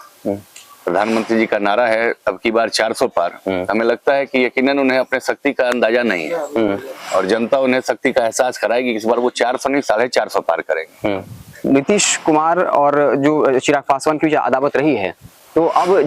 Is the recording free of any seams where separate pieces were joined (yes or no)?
no